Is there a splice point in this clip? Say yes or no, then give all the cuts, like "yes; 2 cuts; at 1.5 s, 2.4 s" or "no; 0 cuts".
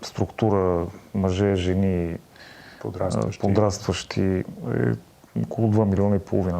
no; 0 cuts